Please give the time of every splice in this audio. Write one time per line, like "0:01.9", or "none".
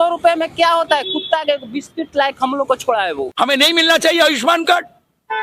0:03.3